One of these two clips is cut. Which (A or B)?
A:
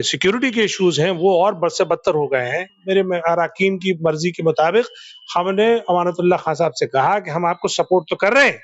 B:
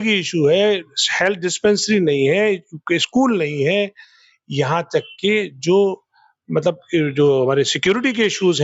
A